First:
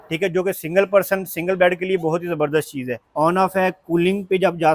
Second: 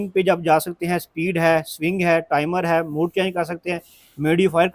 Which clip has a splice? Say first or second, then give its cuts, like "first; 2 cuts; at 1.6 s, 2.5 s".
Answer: first; 1 cut; at 3.1 s